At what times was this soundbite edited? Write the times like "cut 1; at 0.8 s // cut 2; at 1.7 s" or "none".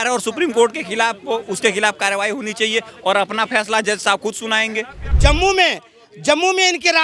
cut 1; at 5.0 s